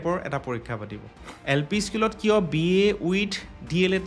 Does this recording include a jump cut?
yes; 1 cut; at 1.3 s

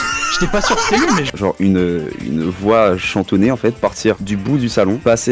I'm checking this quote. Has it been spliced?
yes; 1 cut; at 1.3 s

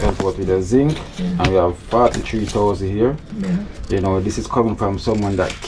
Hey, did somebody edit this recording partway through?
no; 0 cuts

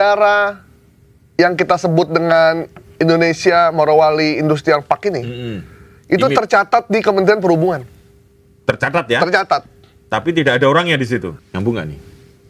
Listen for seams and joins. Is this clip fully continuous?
no; 1 cut; at 11.3 s

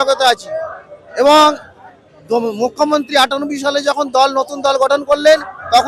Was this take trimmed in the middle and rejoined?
no; 0 cuts

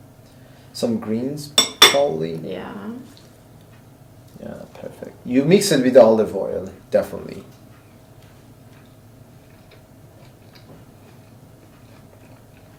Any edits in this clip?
no; 0 cuts

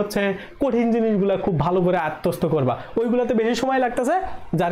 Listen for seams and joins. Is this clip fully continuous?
yes; 0 cuts

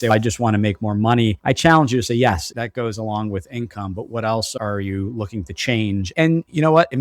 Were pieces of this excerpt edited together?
yes; 2 cuts; at 1.4 s, 6.2 s

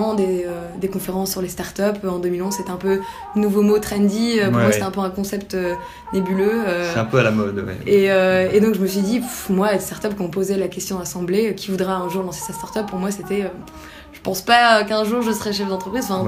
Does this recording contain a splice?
no; 0 cuts

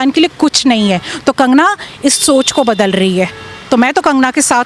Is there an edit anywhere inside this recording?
no; 0 cuts

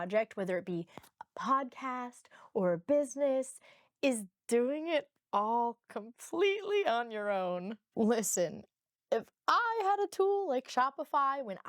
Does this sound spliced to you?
yes; 1 cut; at 7.8 s

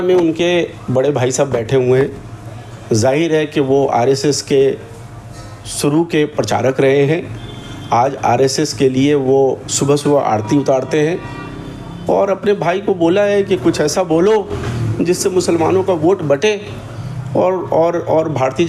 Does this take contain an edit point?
no; 0 cuts

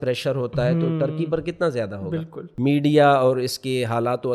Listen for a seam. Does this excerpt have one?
yes; 1 cut; at 2.4 s

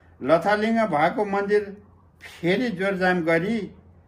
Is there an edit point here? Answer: no; 0 cuts

